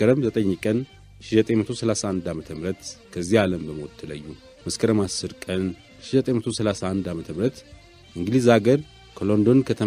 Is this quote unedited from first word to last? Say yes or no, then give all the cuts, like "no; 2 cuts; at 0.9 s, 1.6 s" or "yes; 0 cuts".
no; 1 cut; at 4.6 s